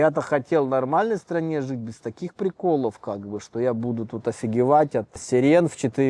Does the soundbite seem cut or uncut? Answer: uncut